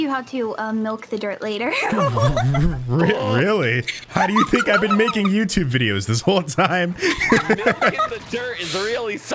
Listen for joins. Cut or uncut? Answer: uncut